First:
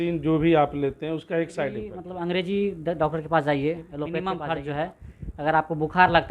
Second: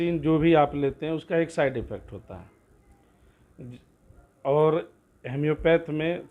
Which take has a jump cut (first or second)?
first